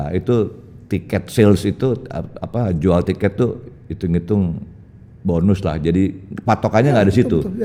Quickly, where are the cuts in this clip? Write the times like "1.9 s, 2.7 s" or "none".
none